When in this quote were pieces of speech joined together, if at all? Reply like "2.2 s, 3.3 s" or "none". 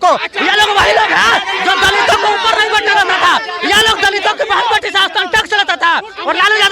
none